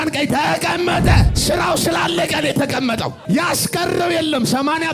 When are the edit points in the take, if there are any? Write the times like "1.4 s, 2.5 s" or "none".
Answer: 1.3 s, 3.2 s